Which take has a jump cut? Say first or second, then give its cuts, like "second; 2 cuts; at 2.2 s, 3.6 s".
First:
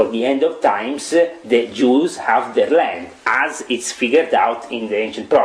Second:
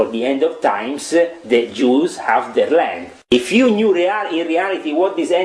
second; 1 cut; at 3.3 s